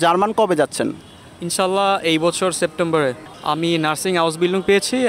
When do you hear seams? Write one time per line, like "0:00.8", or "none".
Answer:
0:03.2